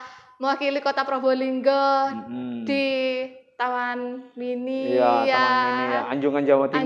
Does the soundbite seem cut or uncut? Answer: uncut